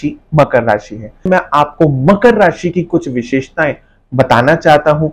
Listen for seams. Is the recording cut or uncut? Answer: cut